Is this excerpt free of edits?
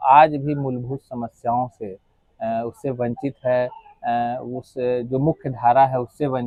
yes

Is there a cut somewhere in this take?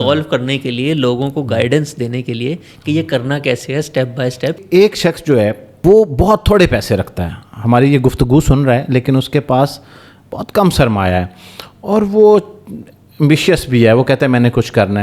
yes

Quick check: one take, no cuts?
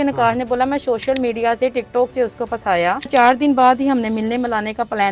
no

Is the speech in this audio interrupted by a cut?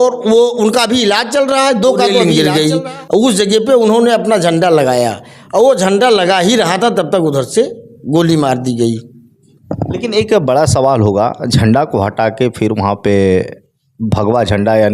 yes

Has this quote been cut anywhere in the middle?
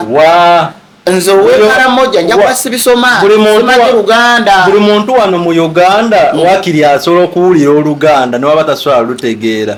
no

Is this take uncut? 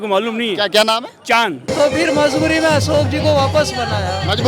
no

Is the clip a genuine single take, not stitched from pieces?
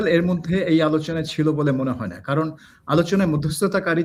yes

